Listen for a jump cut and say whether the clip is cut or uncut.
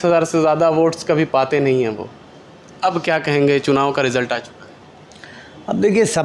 uncut